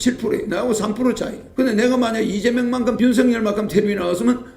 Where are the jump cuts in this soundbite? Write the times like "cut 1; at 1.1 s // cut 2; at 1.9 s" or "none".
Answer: cut 1; at 1.4 s // cut 2; at 3.0 s

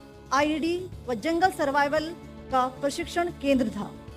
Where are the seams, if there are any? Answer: none

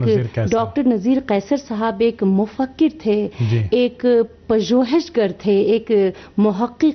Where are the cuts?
none

